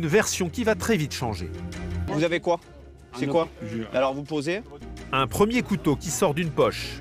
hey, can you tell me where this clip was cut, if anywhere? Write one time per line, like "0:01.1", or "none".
0:02.0
0:04.8